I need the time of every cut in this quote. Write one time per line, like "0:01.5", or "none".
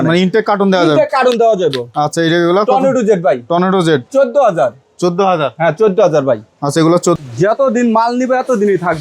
0:07.2